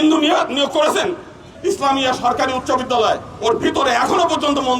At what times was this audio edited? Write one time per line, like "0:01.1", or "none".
0:01.4